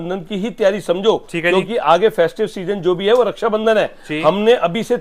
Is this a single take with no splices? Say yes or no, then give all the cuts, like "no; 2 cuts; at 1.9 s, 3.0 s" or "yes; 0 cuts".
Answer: yes; 0 cuts